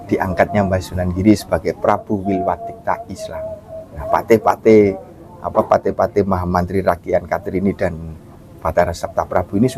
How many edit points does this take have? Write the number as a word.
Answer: one